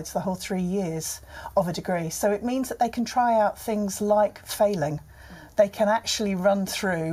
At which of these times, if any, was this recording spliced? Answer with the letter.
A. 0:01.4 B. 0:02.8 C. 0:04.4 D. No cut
D